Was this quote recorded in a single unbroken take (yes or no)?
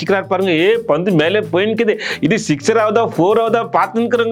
yes